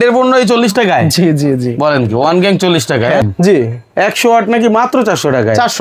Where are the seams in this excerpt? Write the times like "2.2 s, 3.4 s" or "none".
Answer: 3.3 s

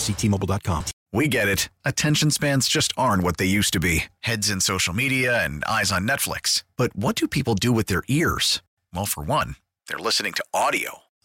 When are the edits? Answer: 0.9 s

